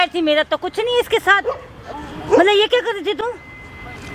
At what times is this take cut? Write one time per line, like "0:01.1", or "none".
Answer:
none